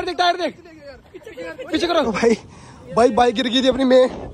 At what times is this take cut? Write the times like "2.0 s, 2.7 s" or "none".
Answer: 2.1 s